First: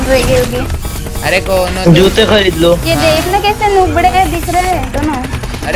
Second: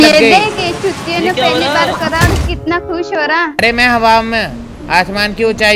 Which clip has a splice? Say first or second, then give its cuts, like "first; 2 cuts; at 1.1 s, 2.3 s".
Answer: second; 1 cut; at 3.6 s